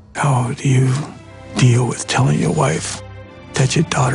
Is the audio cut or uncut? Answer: uncut